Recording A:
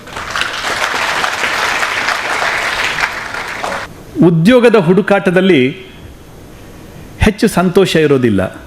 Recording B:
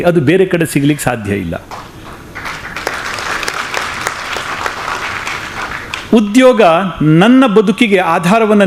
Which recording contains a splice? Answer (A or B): A